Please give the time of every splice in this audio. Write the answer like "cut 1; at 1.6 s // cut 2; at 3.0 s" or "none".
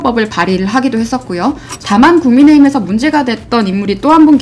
cut 1; at 1.7 s